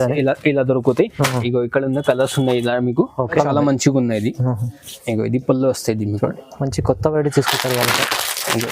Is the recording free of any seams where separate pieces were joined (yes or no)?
no